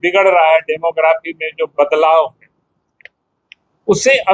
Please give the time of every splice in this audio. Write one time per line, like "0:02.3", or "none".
none